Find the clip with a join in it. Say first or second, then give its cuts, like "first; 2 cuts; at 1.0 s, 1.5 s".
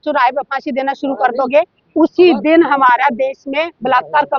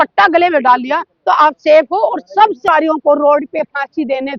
second; 1 cut; at 2.6 s